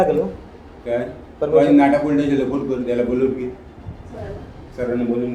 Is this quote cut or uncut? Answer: uncut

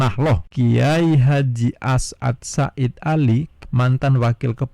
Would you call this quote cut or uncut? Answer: cut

